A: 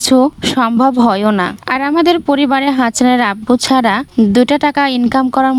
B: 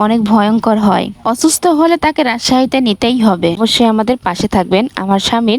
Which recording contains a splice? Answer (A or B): B